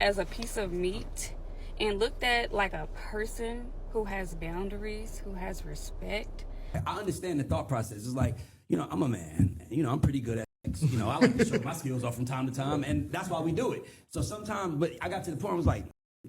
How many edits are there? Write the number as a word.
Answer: one